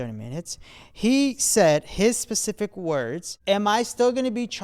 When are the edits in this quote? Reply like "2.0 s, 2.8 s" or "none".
3.3 s